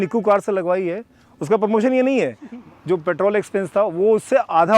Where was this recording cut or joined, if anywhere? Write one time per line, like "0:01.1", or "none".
0:02.5